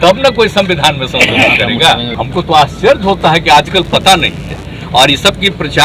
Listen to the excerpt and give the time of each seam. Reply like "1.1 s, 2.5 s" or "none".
2.1 s